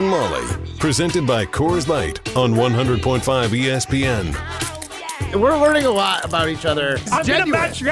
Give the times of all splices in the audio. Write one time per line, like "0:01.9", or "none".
0:05.2